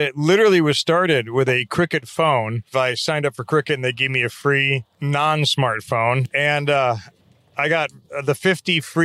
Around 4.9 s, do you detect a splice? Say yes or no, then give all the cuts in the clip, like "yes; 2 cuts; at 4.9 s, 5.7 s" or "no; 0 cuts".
yes; 3 cuts; at 2.7 s, 4.9 s, 6.3 s